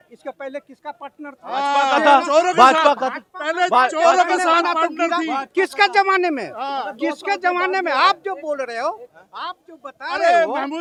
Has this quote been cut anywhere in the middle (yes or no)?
no